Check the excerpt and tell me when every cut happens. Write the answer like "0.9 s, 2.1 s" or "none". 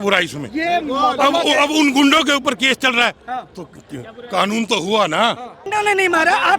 5.6 s